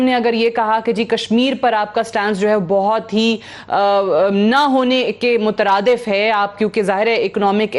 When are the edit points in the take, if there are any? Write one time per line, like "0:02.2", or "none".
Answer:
none